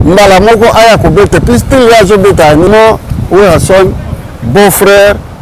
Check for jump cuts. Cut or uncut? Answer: cut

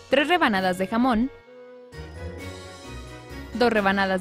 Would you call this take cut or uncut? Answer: uncut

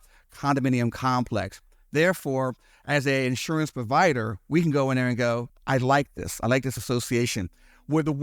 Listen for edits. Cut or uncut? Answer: cut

